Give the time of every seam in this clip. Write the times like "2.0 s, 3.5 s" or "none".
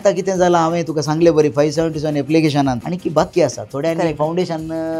2.8 s